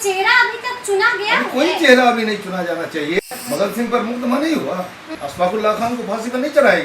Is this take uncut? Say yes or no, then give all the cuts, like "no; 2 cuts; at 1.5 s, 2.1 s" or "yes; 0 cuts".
no; 2 cuts; at 3.2 s, 5.2 s